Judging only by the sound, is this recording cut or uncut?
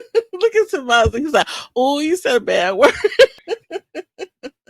cut